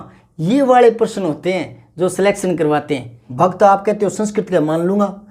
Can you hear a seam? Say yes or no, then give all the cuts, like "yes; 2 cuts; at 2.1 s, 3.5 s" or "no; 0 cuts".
yes; 1 cut; at 3.2 s